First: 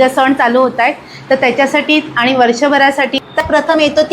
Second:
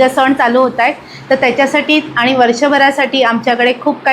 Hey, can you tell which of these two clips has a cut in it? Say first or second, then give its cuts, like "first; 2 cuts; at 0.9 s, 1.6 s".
first; 1 cut; at 3.1 s